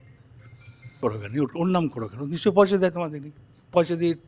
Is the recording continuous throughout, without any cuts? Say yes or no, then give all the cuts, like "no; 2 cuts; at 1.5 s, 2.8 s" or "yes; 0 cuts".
no; 1 cut; at 1.0 s